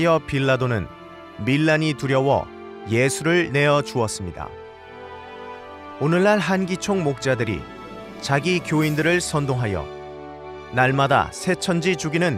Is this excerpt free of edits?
yes; 0 cuts

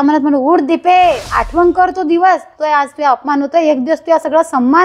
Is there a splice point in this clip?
yes; 2 cuts; at 1.3 s, 2.5 s

